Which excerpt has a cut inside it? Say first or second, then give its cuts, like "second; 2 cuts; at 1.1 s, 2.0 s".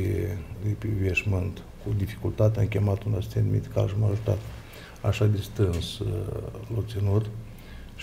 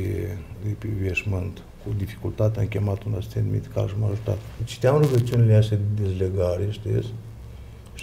second; 1 cut; at 4.6 s